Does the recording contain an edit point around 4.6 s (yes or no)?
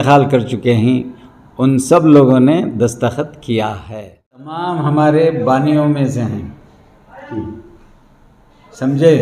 yes